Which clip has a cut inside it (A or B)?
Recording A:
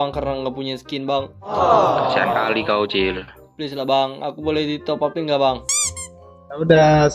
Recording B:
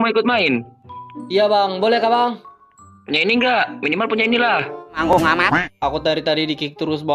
B